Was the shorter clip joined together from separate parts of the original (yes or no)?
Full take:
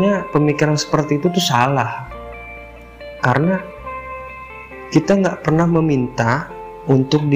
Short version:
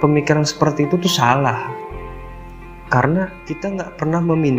yes